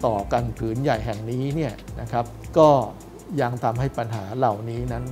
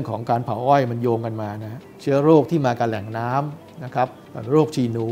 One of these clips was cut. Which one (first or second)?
second